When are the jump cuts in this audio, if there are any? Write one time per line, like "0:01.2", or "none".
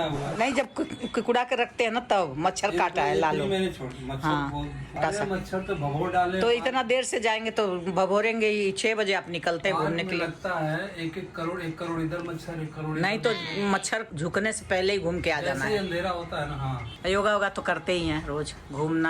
0:05.0
0:16.8